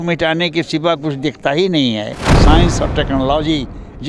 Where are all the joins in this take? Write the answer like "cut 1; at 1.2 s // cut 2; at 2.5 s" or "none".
cut 1; at 2.3 s